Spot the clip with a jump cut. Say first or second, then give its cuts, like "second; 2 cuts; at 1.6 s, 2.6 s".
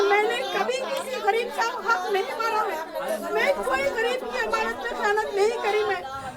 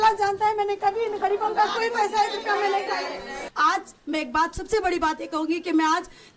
second; 1 cut; at 3.4 s